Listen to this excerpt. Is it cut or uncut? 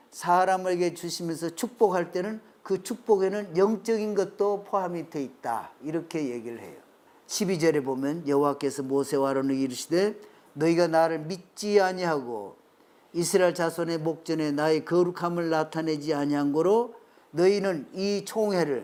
uncut